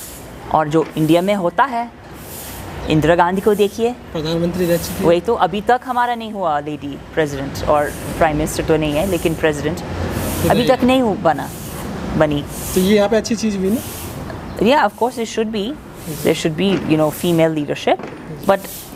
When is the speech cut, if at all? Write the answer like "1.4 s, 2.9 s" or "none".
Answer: none